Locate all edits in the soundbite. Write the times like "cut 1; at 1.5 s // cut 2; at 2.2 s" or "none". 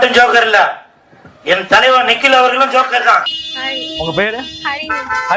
cut 1; at 3.4 s